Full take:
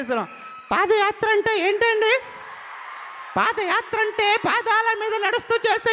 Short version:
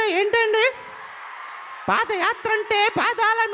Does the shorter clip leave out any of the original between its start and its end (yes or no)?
no